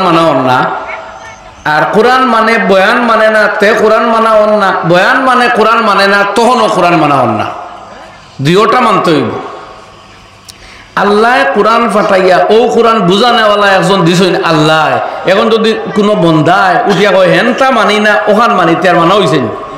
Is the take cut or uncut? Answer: uncut